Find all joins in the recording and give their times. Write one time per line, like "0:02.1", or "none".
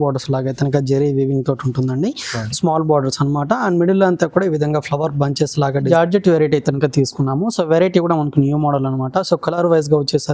0:05.8